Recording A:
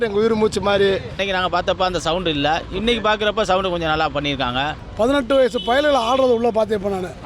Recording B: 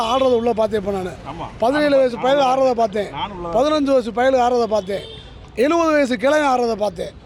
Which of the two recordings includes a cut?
A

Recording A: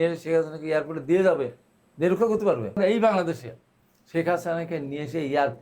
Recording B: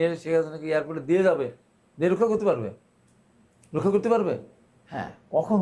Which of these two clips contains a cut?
A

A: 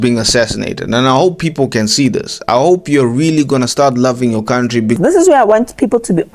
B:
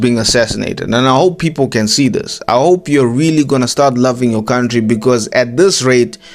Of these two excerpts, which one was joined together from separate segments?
A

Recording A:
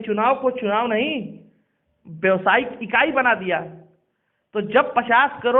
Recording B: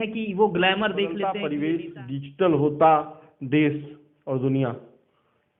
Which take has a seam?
B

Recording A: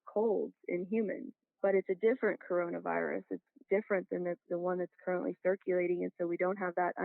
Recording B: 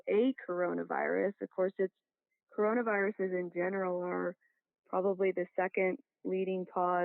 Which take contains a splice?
A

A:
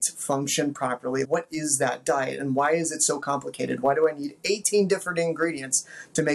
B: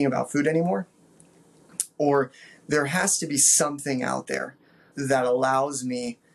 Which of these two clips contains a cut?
B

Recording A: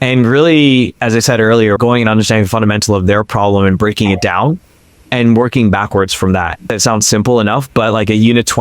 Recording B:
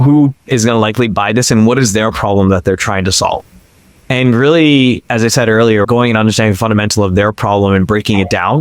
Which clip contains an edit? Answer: A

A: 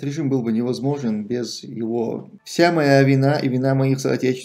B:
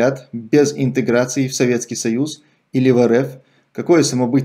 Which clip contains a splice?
A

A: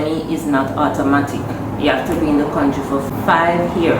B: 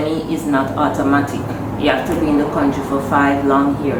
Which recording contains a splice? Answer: A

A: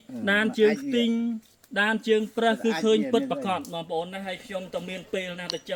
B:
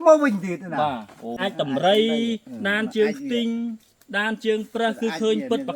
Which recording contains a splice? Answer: B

